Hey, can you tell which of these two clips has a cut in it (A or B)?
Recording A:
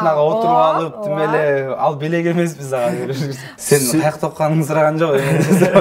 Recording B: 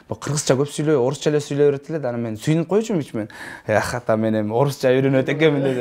A